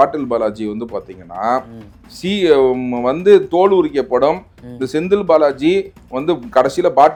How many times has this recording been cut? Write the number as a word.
zero